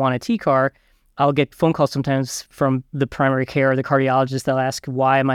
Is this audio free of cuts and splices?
no; 2 cuts; at 1.1 s, 2.9 s

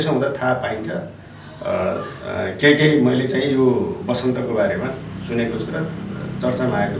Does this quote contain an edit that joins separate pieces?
no; 0 cuts

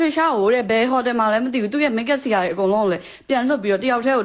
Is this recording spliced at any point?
no; 0 cuts

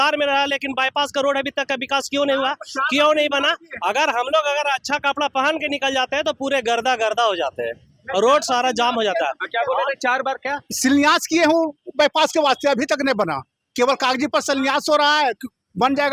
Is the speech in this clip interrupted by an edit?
no; 0 cuts

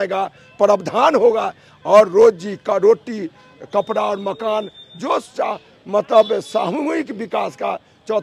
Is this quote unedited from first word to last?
yes; 0 cuts

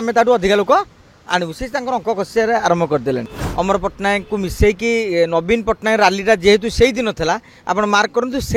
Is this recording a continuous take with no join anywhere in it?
no; 1 cut; at 3.4 s

